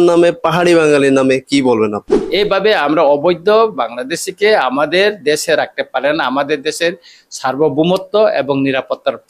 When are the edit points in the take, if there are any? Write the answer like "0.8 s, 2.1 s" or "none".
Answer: 2.2 s